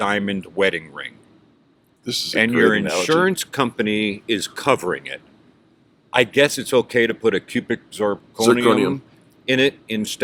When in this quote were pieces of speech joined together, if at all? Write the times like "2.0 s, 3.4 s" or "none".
none